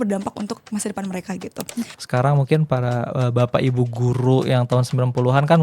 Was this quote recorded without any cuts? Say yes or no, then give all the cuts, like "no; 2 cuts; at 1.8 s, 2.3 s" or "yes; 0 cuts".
no; 1 cut; at 2.0 s